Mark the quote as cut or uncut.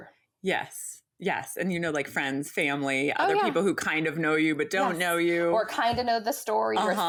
uncut